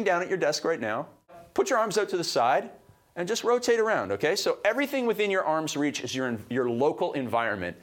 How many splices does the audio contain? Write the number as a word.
one